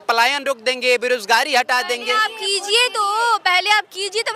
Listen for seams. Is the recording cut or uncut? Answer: uncut